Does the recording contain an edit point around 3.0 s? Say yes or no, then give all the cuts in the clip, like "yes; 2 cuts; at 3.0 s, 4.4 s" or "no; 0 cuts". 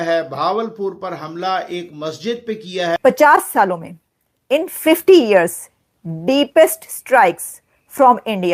yes; 1 cut; at 3.0 s